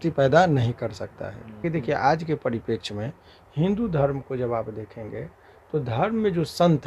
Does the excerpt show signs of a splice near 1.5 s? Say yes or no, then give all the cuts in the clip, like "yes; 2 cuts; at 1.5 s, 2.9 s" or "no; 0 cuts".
yes; 1 cut; at 1.5 s